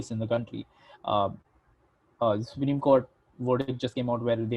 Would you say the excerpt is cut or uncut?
uncut